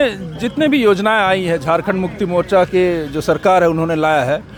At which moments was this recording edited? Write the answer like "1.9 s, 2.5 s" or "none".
none